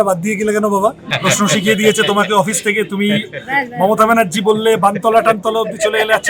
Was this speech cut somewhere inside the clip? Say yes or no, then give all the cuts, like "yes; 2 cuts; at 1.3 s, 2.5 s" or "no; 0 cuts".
yes; 1 cut; at 1.1 s